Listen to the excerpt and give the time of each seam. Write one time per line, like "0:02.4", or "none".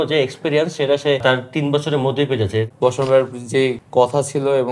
0:01.2
0:02.7
0:03.8